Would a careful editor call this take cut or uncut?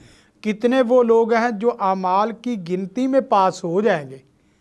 uncut